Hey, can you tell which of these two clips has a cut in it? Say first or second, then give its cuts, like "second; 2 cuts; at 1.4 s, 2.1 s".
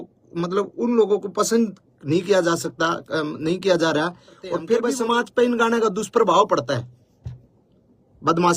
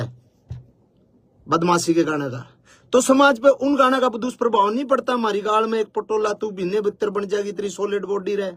first; 1 cut; at 4.7 s